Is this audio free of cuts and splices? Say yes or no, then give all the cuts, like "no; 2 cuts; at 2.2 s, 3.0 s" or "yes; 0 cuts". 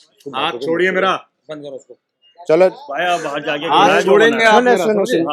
yes; 0 cuts